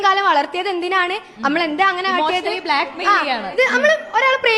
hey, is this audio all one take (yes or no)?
yes